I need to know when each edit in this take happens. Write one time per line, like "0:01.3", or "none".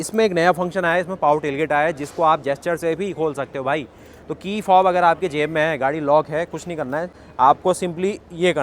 0:07.2